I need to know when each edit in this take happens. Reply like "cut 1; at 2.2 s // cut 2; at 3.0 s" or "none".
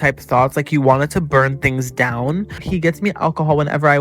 cut 1; at 2.5 s